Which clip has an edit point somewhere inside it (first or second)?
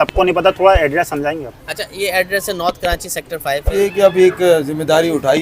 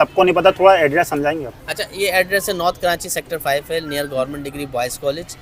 first